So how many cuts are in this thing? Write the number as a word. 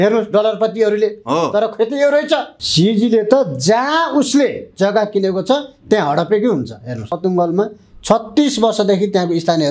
two